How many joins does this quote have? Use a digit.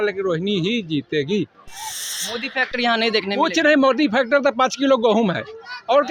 0